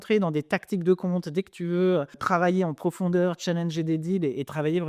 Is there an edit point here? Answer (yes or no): yes